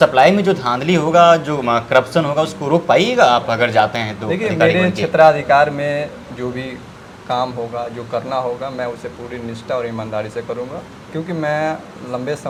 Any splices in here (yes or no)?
no